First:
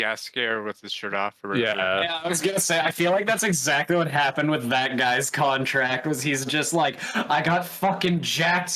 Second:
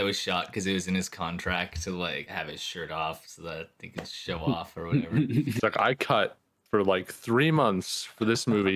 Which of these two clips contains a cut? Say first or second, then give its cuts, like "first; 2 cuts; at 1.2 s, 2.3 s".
second; 2 cuts; at 2.2 s, 5.6 s